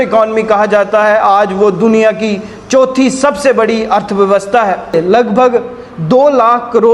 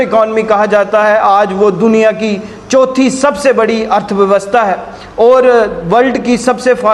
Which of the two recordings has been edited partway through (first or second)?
first